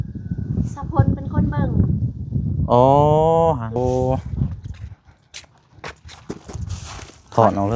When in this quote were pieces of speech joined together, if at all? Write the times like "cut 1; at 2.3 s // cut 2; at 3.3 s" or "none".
cut 1; at 3.8 s